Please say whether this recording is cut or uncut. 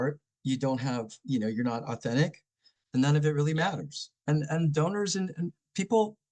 uncut